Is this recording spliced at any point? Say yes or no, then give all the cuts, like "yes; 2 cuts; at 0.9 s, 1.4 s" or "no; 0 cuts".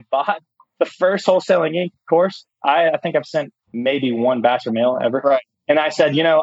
yes; 2 cuts; at 3.6 s, 5.5 s